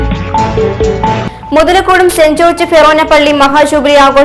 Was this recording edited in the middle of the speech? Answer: no; 0 cuts

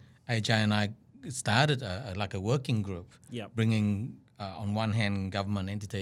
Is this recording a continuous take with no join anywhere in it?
yes; 0 cuts

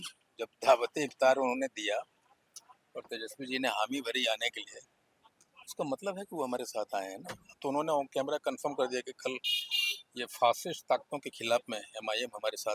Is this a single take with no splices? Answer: yes; 0 cuts

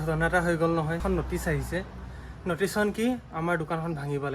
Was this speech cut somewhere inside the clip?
yes; 1 cut; at 1.0 s

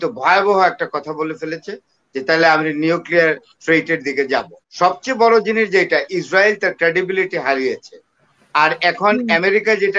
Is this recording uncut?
no; 1 cut; at 4.6 s

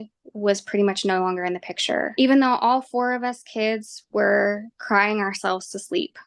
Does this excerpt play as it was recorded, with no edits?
no; 1 cut; at 2.1 s

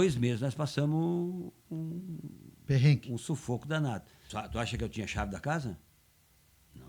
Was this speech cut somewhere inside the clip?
yes; 1 cut; at 4.2 s

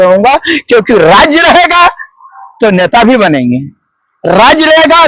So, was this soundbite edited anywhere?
no; 0 cuts

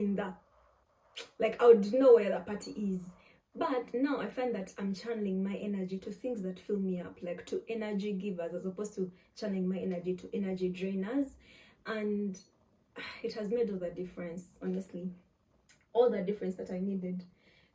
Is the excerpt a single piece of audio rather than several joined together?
yes; 0 cuts

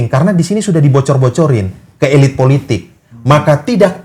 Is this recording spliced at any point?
no; 0 cuts

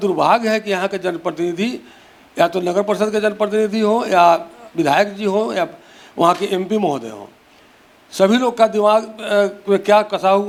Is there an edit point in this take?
no; 0 cuts

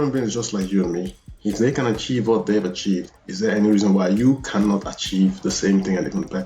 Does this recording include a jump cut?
no; 0 cuts

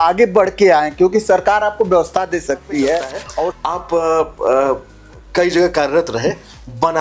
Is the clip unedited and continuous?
no; 1 cut; at 3.5 s

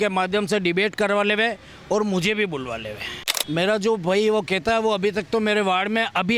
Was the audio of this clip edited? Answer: yes; 1 cut; at 3.4 s

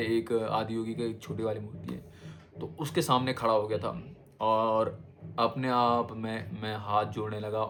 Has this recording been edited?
no; 0 cuts

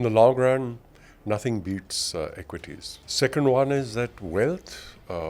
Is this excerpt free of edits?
yes; 0 cuts

